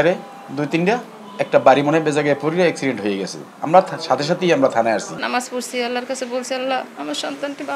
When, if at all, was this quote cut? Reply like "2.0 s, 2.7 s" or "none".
5.1 s